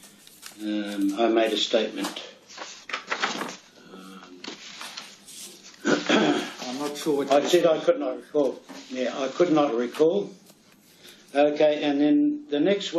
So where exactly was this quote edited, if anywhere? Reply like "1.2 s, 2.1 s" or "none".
3.6 s